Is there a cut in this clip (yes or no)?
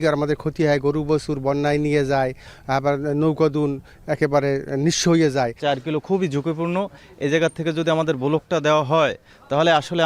yes